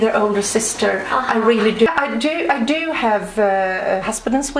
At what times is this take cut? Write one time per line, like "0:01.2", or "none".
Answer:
0:01.9